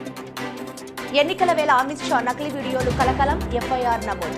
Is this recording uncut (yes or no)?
no